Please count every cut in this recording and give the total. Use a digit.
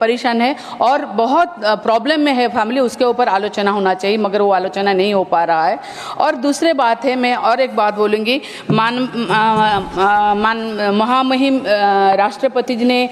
0